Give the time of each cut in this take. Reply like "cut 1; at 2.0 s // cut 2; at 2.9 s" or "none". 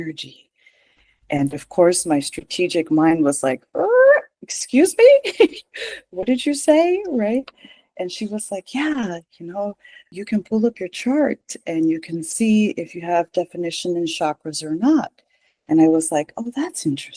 cut 1; at 10.1 s